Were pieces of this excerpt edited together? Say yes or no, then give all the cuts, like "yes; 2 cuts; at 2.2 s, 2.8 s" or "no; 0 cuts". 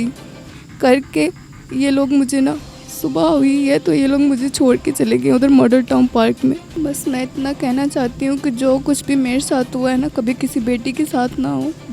yes; 1 cut; at 6.7 s